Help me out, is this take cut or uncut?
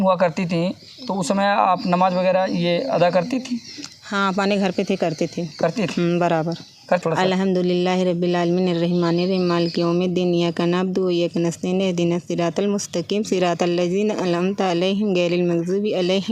cut